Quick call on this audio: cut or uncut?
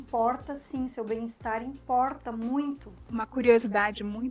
cut